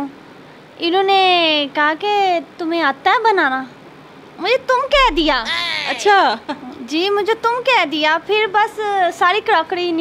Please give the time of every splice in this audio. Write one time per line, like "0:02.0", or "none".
none